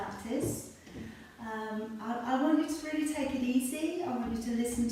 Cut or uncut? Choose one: uncut